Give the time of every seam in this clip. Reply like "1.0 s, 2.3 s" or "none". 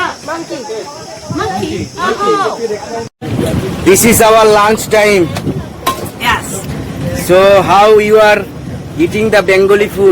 3.2 s